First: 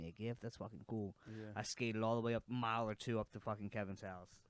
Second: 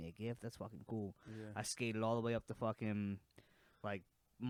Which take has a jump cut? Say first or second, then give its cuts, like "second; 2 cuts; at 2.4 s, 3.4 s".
first; 1 cut; at 2.4 s